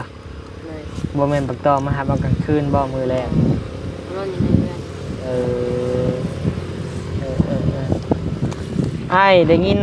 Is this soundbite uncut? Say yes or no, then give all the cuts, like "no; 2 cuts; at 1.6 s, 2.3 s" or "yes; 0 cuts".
yes; 0 cuts